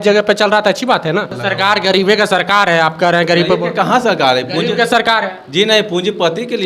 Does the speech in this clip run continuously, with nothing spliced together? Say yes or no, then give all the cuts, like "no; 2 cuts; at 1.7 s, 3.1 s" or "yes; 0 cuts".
no; 1 cut; at 1.3 s